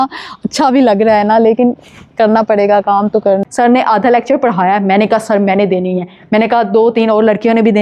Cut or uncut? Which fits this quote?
cut